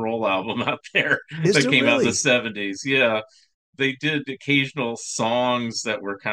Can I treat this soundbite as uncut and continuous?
yes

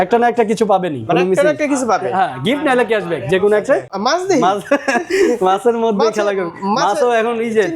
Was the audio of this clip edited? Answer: yes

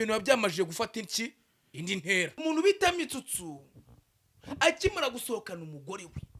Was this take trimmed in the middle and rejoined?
yes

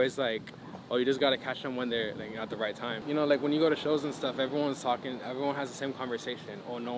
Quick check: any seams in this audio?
yes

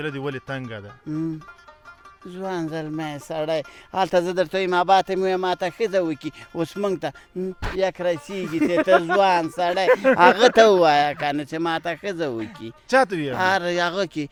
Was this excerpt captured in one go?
yes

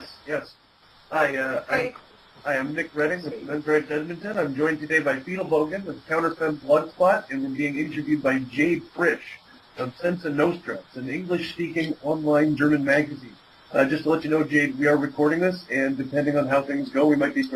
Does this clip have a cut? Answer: no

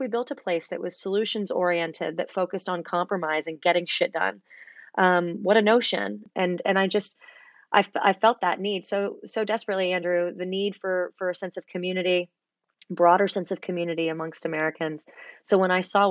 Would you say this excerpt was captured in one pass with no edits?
no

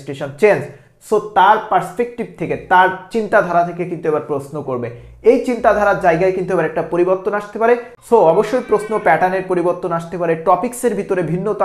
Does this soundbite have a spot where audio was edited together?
yes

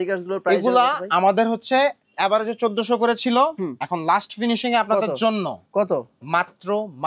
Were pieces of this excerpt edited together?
no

